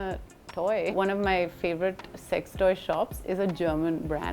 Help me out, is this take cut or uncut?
cut